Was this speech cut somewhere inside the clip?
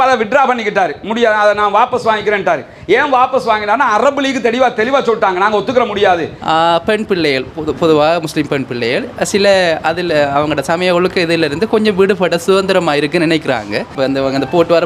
yes; 2 cuts; at 6.3 s, 13.9 s

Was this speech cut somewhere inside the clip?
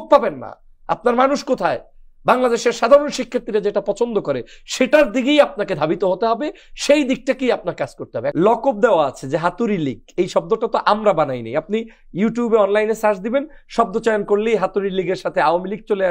yes; 1 cut; at 8.2 s

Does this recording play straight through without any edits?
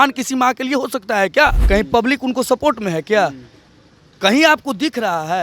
no; 1 cut; at 1.6 s

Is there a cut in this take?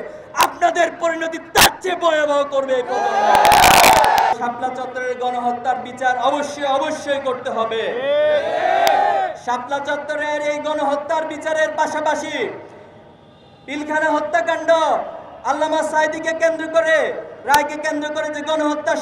yes; 1 cut; at 4.3 s

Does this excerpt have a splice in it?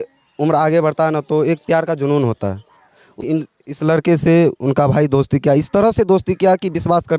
yes; 1 cut; at 3.2 s

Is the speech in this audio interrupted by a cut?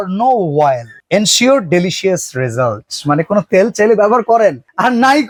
no; 0 cuts

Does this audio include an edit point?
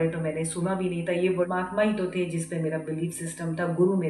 yes; 1 cut; at 1.5 s

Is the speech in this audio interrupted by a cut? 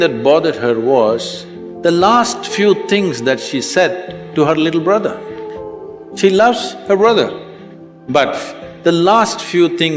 no; 0 cuts

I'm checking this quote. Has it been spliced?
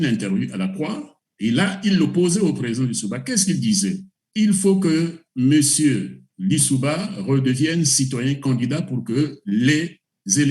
yes; 1 cut; at 4.1 s

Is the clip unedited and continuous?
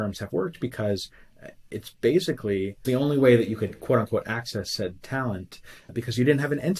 no; 2 cuts; at 2.8 s, 5.9 s

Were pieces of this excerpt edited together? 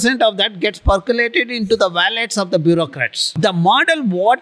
yes; 1 cut; at 3.4 s

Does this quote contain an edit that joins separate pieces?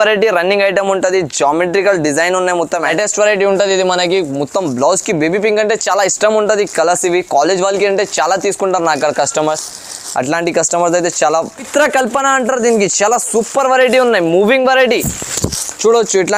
yes; 2 cuts; at 2.9 s, 11.7 s

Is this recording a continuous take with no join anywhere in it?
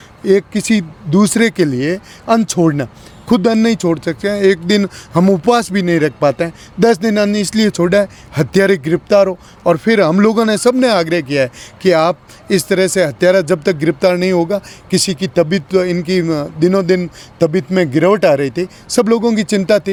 yes; 0 cuts

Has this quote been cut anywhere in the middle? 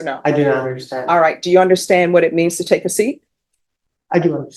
no; 0 cuts

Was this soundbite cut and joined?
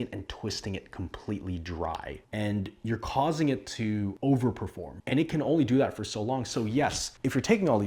no; 0 cuts

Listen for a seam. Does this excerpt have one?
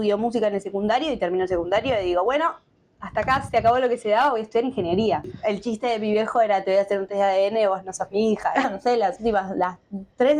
yes; 2 cuts; at 5.3 s, 8.7 s

